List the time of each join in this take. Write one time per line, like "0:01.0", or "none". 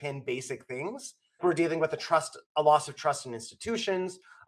none